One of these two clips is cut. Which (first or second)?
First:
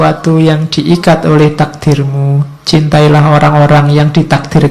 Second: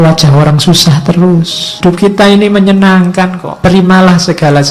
second